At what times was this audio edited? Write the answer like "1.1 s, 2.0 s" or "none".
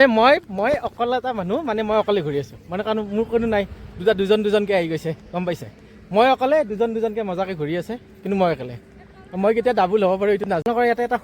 none